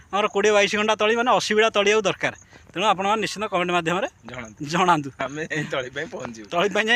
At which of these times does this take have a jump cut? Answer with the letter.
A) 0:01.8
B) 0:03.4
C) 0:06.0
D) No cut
D